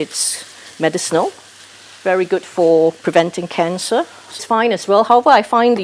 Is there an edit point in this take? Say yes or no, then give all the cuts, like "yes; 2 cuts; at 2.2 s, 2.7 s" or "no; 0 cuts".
yes; 1 cut; at 4.4 s